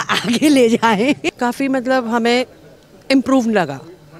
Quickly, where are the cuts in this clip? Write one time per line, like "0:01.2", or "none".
0:01.2

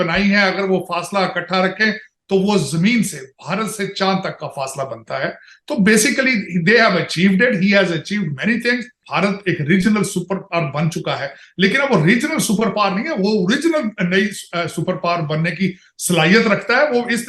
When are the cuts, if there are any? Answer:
0:09.0

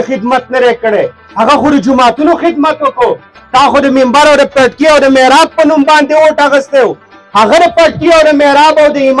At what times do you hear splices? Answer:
none

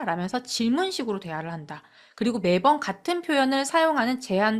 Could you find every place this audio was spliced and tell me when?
none

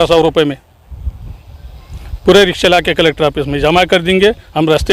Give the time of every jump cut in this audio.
none

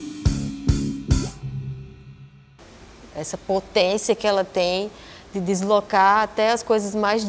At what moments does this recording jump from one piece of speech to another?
0:02.3

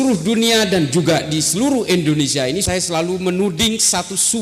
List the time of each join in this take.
0:02.6

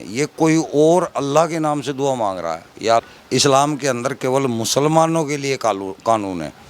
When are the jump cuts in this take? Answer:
0:03.0

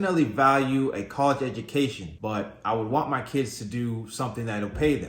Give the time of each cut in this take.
none

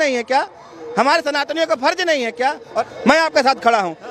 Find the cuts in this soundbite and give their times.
none

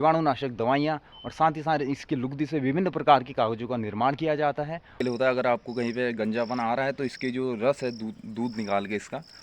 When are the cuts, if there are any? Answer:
0:05.0

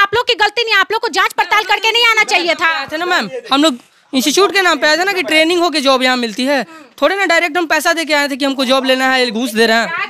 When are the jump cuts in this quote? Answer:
none

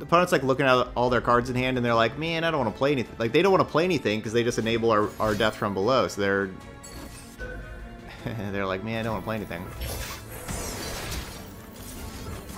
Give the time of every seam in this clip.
none

